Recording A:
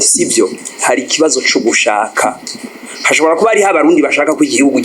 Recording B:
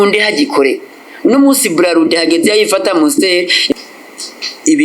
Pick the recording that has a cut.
B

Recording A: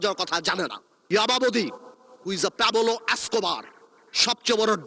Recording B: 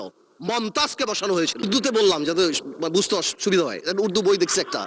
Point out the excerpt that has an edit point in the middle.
B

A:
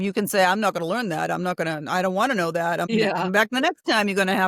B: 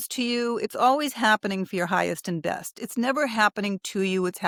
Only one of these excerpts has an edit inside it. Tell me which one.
A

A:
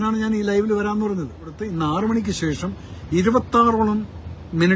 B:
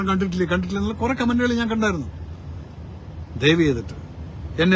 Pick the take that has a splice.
A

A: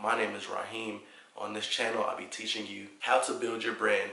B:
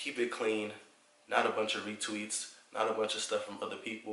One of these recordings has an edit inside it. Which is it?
A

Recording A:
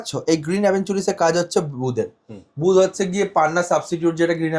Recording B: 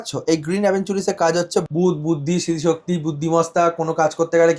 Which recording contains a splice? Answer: B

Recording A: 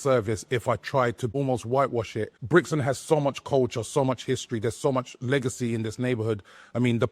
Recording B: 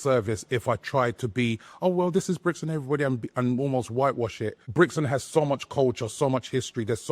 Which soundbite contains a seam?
A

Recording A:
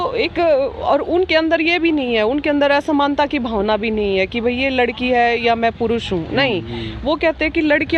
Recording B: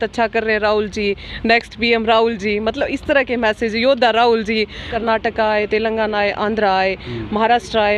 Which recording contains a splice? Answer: B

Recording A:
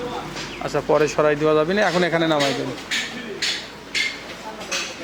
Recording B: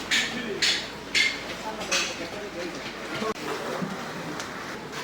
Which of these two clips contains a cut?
B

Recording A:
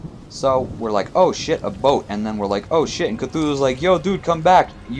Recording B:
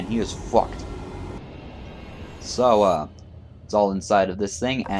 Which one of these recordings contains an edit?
B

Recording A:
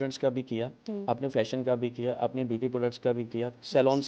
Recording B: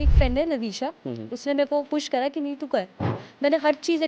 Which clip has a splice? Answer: B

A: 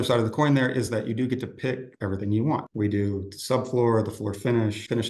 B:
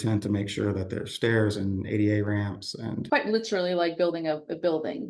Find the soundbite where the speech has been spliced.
A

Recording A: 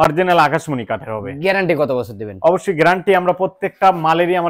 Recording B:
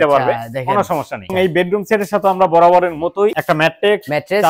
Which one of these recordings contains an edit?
B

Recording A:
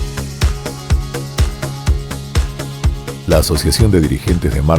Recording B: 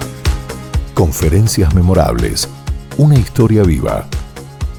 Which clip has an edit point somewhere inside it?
A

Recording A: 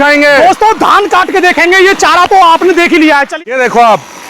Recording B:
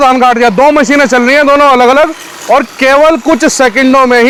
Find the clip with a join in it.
A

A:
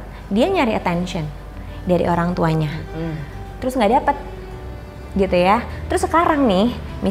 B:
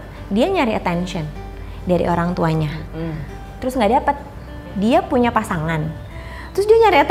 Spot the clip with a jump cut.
B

